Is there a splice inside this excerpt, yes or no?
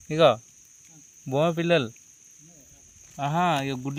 no